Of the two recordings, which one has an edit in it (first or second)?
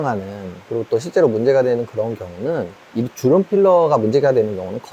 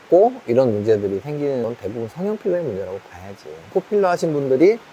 second